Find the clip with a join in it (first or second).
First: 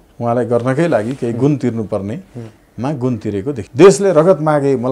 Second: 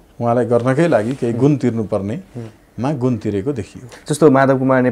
first